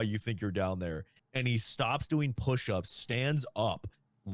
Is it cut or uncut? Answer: uncut